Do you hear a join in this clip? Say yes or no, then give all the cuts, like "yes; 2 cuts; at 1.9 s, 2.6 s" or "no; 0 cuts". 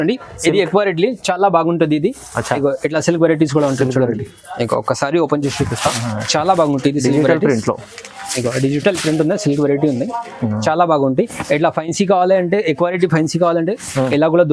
no; 0 cuts